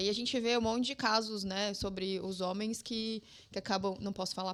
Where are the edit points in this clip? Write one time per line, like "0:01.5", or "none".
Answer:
none